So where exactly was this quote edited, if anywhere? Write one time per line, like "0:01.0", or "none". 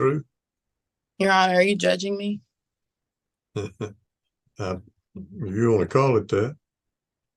none